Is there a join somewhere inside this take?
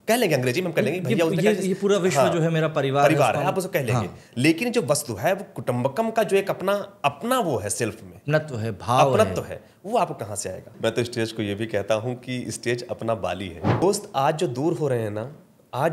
yes; 2 cuts; at 10.7 s, 13.8 s

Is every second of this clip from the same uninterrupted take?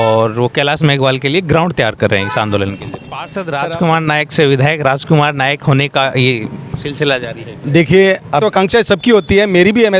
no; 2 cuts; at 3.3 s, 8.4 s

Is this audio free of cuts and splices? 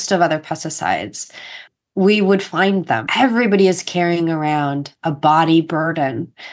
no; 2 cuts; at 1.7 s, 3.1 s

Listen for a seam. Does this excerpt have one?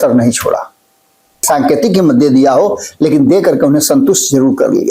yes; 1 cut; at 1.4 s

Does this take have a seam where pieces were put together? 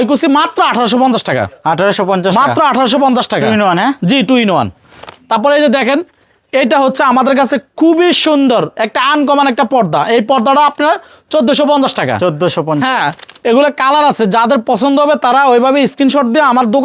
no; 0 cuts

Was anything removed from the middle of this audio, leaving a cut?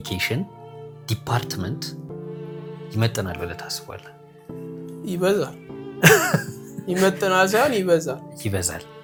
no; 0 cuts

